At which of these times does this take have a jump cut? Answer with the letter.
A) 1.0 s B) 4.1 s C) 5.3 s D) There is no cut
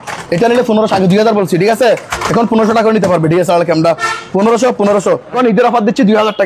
C